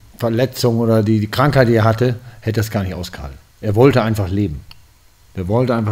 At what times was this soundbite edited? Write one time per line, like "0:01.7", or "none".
none